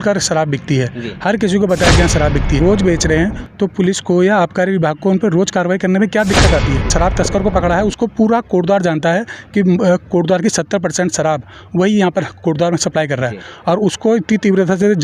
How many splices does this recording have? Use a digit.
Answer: 2